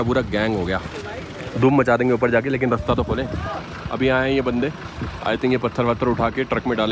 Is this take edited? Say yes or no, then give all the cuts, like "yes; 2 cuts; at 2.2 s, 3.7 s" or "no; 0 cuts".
no; 0 cuts